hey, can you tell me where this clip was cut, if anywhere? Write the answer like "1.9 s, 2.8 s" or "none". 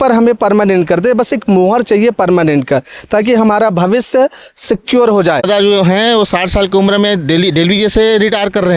5.4 s